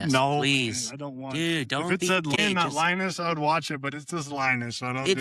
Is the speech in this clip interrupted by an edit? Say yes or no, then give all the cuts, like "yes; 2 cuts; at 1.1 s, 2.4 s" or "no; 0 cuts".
yes; 1 cut; at 2.4 s